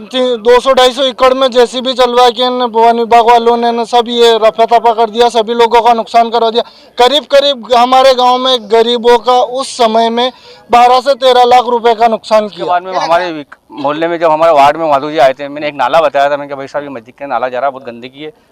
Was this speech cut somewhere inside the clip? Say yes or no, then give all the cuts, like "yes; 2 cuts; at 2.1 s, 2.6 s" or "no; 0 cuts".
yes; 1 cut; at 12.7 s